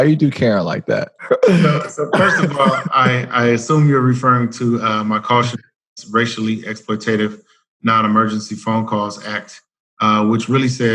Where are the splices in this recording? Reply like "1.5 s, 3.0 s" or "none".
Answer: 1.2 s